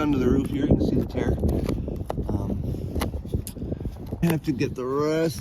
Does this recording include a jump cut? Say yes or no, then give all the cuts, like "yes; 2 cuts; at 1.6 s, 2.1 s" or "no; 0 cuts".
yes; 1 cut; at 4.2 s